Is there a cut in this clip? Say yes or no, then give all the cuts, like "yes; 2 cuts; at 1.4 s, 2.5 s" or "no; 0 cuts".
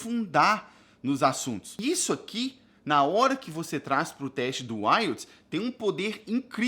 yes; 1 cut; at 1.7 s